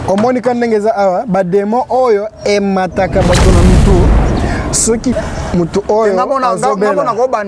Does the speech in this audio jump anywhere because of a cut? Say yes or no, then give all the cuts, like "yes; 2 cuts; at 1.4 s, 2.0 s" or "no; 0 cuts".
yes; 1 cut; at 5.1 s